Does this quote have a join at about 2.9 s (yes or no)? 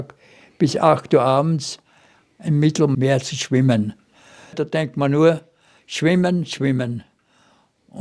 yes